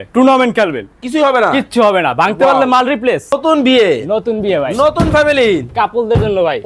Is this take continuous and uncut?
no; 1 cut; at 3.3 s

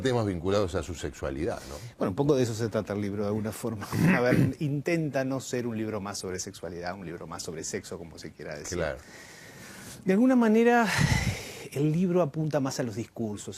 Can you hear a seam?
yes; 1 cut; at 5.2 s

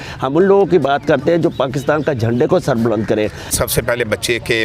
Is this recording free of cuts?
no; 1 cut; at 3.5 s

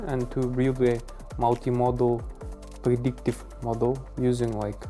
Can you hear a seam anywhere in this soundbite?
no; 0 cuts

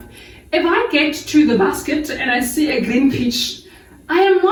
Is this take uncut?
yes; 0 cuts

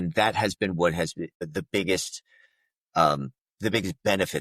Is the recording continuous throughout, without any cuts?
no; 1 cut; at 1.4 s

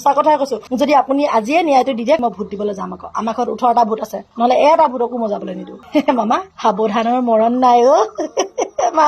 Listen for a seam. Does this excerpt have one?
yes; 1 cut; at 2.2 s

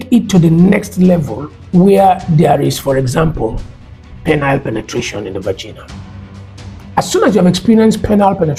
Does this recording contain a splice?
no; 0 cuts

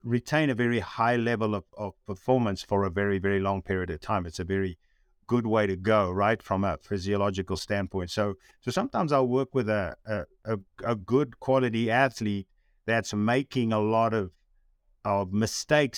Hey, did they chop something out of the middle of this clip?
yes; 1 cut; at 8.5 s

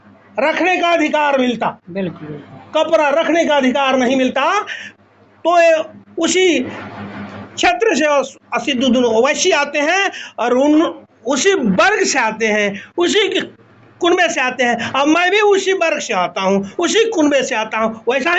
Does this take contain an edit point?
no; 0 cuts

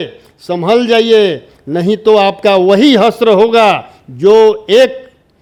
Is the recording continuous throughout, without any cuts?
yes; 0 cuts

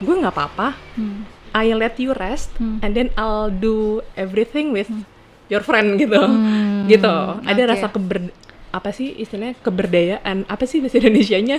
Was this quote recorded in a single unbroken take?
yes; 0 cuts

